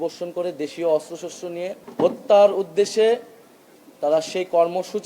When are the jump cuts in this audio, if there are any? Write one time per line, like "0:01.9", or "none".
0:01.8